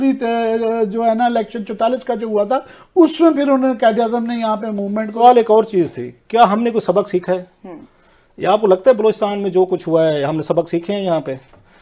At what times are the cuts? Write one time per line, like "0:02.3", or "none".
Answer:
0:05.1